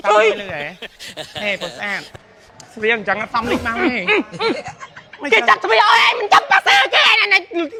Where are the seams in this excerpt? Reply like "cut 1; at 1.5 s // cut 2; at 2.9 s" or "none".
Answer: none